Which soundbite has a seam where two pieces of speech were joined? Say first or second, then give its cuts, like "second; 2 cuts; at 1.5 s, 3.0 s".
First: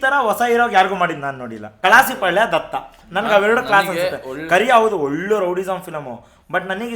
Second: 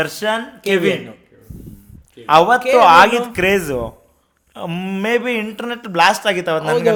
first; 1 cut; at 1.7 s